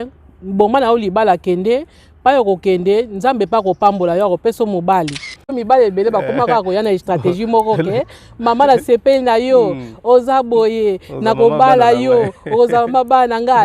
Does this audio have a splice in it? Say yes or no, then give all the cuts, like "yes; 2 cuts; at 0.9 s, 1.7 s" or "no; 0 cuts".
yes; 1 cut; at 5.6 s